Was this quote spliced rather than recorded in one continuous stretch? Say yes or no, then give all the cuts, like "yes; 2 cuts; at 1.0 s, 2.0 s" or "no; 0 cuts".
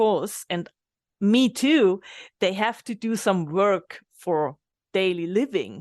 yes; 1 cut; at 4.7 s